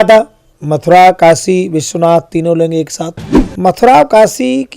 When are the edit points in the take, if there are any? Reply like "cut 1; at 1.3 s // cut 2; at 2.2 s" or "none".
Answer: cut 1; at 3.4 s

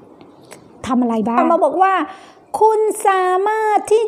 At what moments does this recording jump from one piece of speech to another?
cut 1; at 1.4 s

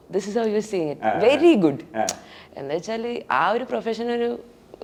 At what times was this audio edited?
none

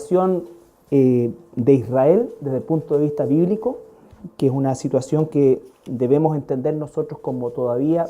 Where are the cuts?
cut 1; at 6.4 s

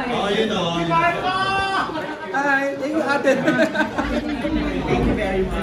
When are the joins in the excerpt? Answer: none

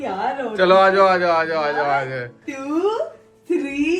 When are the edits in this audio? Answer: none

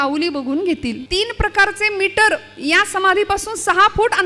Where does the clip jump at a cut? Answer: cut 1; at 1.0 s

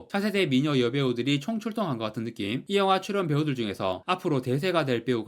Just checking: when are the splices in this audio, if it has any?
cut 1; at 2.6 s

